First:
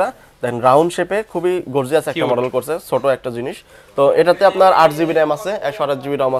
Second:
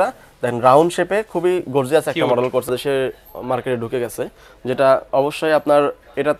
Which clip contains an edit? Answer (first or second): second